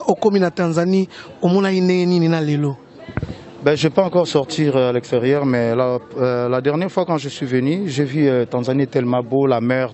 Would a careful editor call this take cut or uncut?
uncut